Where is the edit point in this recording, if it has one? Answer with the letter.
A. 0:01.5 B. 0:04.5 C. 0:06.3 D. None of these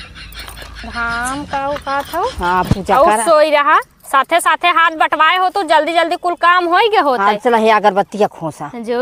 D